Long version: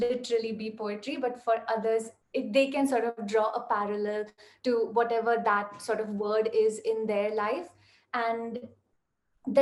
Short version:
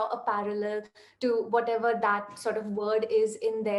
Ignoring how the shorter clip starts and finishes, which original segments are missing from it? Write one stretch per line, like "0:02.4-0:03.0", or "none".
none